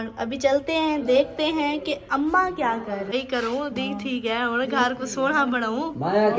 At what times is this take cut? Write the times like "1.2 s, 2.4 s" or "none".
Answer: 3.1 s